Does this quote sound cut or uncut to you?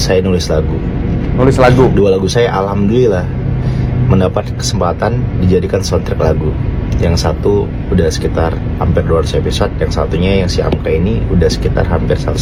uncut